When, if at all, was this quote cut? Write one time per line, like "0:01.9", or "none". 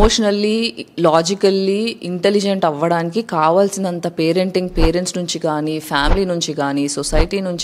none